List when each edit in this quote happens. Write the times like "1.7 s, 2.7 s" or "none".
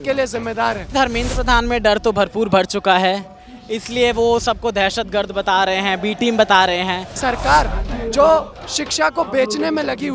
0.9 s, 7.2 s